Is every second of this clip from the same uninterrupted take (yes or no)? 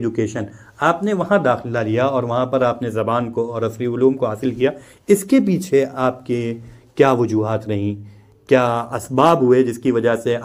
yes